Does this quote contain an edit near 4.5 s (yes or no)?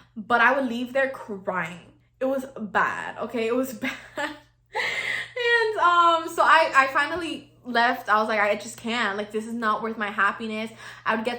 no